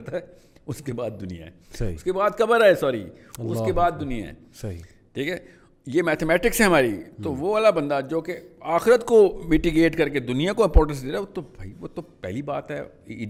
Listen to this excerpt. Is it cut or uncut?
uncut